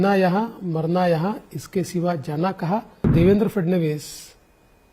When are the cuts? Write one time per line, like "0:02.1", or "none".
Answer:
0:03.1